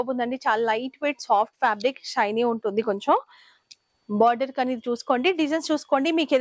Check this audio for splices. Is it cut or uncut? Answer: uncut